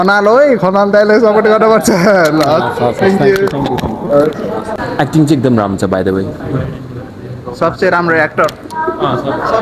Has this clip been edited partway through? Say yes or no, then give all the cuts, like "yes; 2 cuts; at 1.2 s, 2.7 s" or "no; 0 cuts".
yes; 1 cut; at 4.7 s